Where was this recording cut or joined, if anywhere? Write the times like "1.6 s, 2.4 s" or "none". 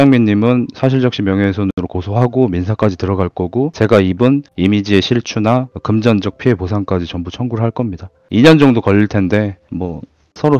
none

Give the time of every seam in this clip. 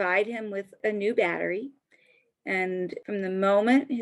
0.8 s, 2.9 s

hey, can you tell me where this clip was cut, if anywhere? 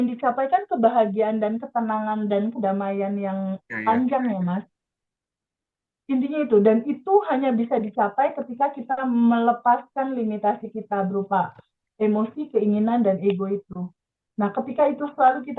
none

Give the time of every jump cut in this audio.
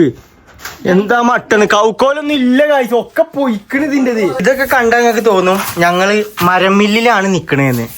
4.4 s

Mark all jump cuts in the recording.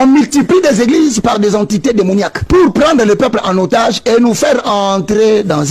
2.4 s

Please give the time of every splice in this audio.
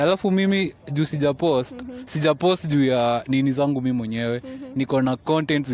none

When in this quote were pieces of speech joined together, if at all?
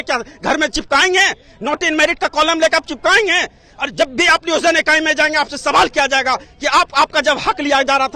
none

